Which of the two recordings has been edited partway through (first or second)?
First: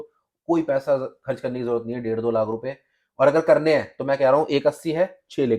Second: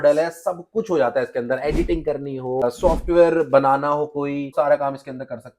second